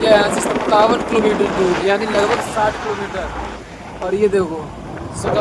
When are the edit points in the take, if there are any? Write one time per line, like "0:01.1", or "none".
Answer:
none